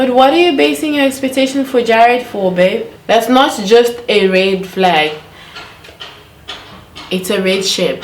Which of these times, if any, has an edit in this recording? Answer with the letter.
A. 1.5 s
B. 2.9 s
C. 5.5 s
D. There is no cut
B